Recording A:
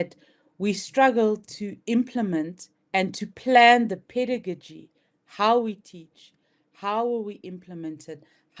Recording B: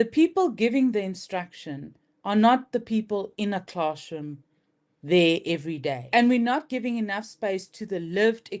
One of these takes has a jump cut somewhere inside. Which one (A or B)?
B